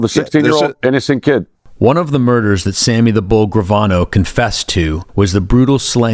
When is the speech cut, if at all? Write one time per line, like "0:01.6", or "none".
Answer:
0:01.6
0:05.0